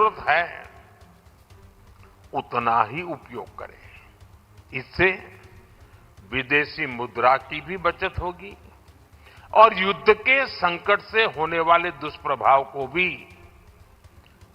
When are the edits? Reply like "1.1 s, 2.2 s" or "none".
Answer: none